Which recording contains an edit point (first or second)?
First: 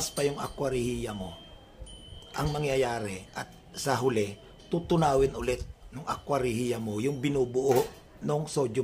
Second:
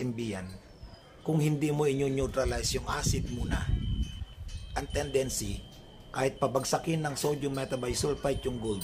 second